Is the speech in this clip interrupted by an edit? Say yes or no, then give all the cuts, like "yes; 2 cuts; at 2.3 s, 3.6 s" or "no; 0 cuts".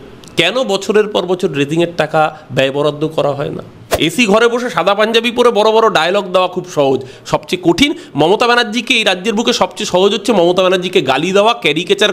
yes; 1 cut; at 3.9 s